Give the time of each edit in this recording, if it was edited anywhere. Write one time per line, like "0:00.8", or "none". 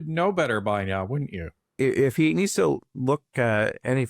0:01.7